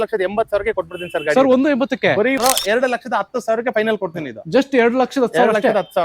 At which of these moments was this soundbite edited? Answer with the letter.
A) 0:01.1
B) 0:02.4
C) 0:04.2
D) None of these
B